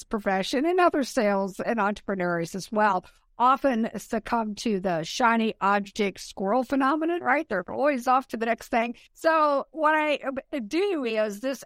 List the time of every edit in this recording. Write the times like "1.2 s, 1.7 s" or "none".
9.0 s